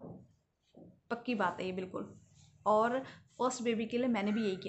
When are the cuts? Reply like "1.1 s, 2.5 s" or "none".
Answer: none